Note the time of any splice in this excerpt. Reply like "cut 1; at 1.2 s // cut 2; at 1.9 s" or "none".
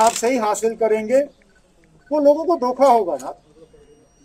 none